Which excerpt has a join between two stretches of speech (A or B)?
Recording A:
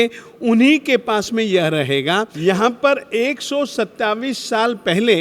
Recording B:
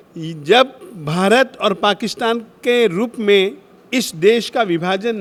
A